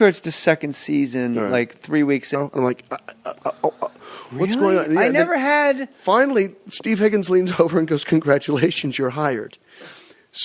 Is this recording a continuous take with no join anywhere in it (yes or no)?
yes